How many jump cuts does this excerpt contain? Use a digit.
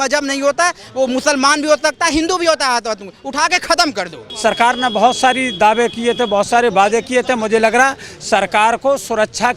1